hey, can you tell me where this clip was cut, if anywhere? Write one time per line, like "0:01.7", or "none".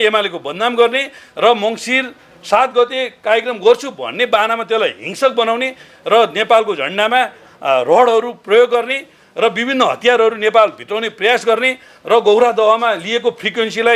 0:01.2